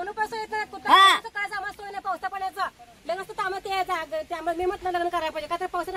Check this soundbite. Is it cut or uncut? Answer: uncut